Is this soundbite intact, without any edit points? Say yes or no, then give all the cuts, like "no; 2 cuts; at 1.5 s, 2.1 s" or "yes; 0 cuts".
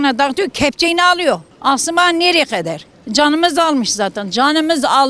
yes; 0 cuts